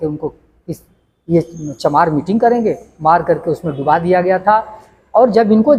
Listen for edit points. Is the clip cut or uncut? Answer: uncut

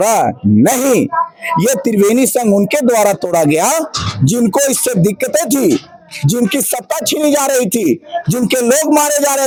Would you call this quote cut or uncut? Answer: uncut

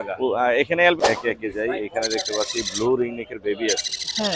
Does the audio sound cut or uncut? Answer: cut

